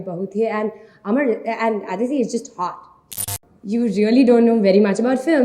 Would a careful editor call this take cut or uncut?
cut